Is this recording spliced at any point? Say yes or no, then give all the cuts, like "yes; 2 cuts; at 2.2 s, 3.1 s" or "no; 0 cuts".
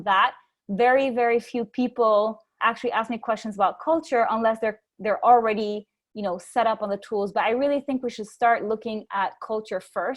yes; 1 cut; at 2.5 s